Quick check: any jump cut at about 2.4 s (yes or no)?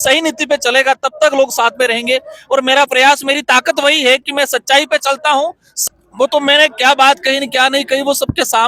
no